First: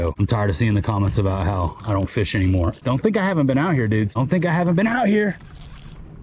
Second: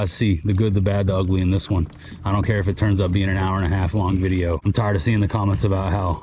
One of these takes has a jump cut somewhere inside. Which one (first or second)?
first